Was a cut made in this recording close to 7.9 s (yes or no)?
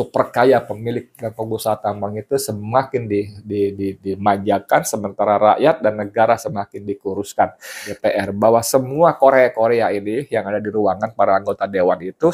yes